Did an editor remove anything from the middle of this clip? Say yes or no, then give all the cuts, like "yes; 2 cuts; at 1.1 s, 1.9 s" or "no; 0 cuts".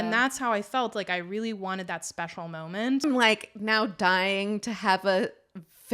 yes; 1 cut; at 3.0 s